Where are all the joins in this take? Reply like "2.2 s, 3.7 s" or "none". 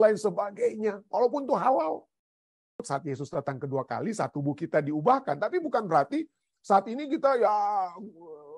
2.5 s